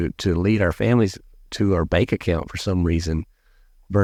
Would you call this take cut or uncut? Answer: uncut